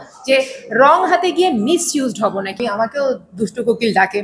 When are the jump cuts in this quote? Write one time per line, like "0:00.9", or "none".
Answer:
0:02.5